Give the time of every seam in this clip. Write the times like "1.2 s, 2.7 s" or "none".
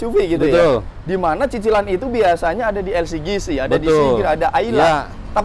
none